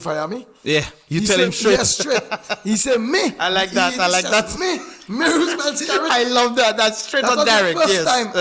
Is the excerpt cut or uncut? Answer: uncut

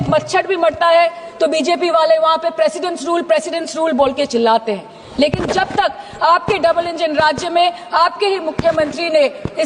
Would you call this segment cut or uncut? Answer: uncut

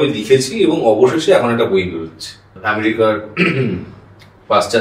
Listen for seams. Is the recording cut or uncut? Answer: cut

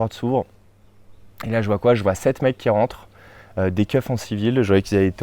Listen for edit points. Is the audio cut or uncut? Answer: uncut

